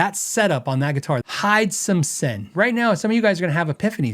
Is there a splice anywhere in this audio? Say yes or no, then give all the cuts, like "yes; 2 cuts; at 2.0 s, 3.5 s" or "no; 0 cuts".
yes; 2 cuts; at 1.2 s, 2.5 s